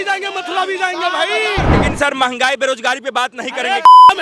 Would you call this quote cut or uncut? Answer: cut